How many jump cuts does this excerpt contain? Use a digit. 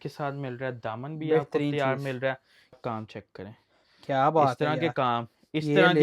1